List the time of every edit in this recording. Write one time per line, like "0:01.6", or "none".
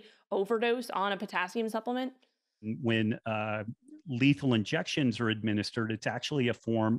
0:02.7